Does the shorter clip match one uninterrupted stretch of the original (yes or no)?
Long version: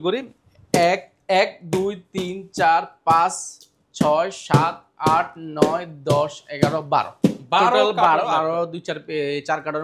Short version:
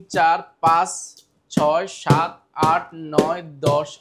yes